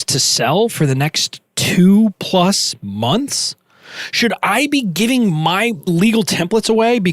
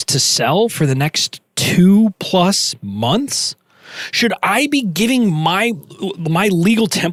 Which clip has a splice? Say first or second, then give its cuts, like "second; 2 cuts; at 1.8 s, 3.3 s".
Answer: first; 1 cut; at 5.9 s